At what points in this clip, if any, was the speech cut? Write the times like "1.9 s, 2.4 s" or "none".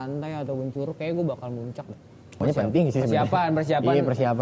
2.4 s